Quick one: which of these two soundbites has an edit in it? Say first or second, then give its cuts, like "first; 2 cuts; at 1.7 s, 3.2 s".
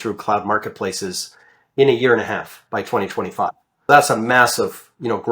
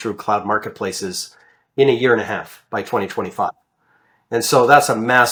first; 1 cut; at 3.9 s